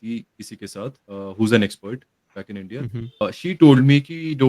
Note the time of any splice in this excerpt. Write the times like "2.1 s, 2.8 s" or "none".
1.0 s, 3.2 s